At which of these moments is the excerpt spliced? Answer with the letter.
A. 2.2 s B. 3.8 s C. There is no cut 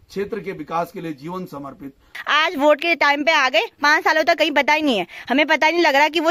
A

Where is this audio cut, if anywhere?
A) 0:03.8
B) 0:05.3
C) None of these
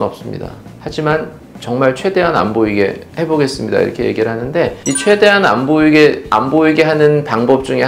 C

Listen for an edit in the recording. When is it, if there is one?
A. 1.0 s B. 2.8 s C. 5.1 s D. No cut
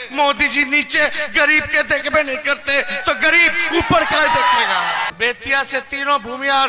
C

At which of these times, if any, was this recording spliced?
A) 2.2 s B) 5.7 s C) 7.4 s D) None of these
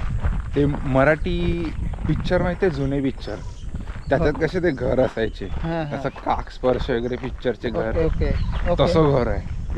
D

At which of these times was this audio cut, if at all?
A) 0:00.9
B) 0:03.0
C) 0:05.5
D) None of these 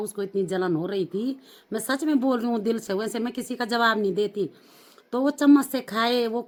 D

